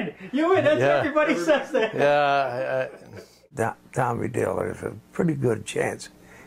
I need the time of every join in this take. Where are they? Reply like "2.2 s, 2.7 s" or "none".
3.5 s